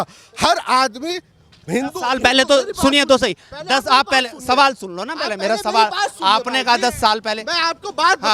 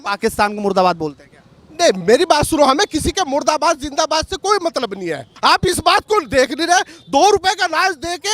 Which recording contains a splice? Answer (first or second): second